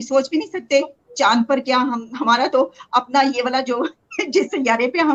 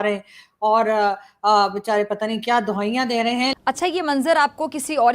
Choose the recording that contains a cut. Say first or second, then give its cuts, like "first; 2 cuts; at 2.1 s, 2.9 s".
second; 1 cut; at 3.5 s